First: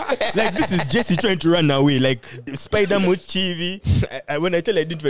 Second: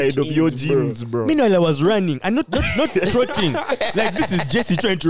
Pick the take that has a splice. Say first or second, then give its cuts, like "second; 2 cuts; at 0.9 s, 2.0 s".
first; 2 cuts; at 2.4 s, 3.8 s